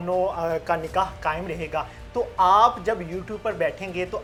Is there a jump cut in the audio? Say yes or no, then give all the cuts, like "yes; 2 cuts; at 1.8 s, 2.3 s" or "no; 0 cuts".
no; 0 cuts